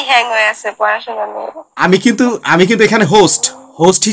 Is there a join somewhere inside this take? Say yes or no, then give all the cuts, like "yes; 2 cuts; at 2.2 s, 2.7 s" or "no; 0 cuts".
no; 0 cuts